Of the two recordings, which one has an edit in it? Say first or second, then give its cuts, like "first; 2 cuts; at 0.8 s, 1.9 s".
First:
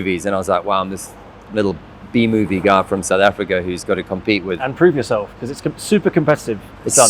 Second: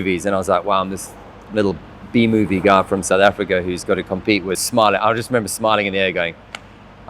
second; 1 cut; at 4.6 s